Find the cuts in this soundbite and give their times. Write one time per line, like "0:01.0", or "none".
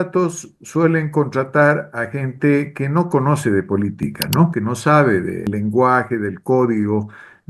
0:05.5

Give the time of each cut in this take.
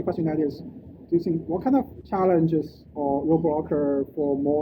0:02.0

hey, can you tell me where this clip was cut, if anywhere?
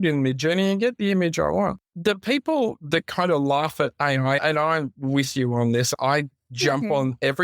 0:01.9

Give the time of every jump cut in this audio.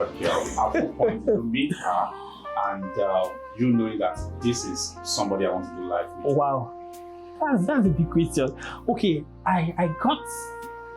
none

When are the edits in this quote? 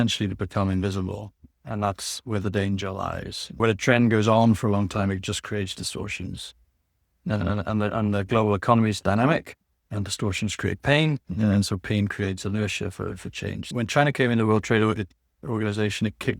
0:03.6
0:13.6

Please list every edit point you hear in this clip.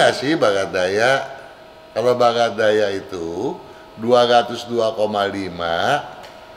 none

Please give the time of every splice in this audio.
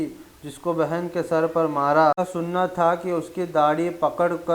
0:02.2

